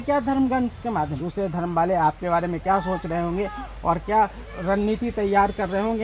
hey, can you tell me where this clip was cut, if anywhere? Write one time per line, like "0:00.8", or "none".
0:01.2